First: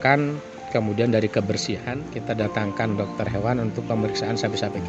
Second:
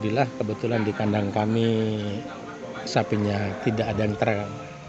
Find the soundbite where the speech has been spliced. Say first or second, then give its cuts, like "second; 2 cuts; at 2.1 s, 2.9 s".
first; 1 cut; at 2.0 s